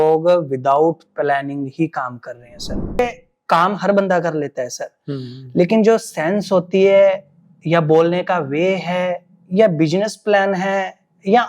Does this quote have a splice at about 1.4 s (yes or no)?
no